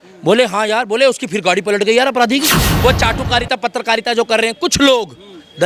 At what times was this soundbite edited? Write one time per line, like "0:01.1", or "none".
0:02.7